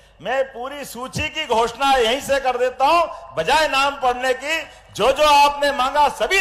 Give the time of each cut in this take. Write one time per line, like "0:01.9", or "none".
none